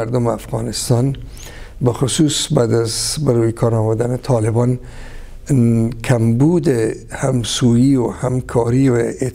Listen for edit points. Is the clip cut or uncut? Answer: uncut